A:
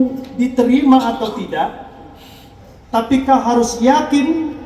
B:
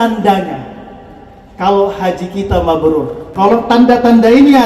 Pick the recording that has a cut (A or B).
B